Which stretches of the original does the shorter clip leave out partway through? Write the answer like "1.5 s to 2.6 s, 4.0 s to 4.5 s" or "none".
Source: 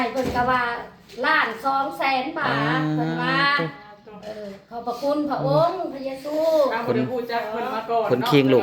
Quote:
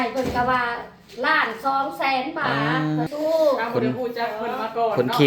3.1 s to 6.2 s